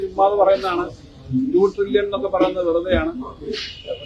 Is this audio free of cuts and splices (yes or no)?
yes